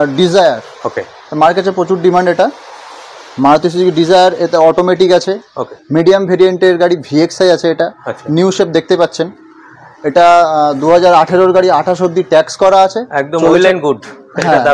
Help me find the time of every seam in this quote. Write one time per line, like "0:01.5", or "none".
none